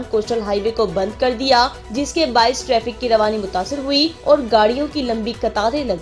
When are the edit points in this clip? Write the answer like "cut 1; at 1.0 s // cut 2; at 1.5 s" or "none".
cut 1; at 1.8 s // cut 2; at 4.2 s